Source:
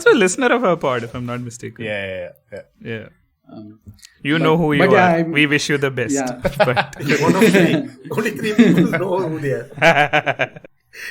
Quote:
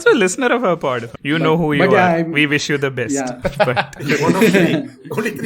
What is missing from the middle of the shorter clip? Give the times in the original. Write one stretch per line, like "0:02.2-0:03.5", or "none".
0:01.1-0:04.1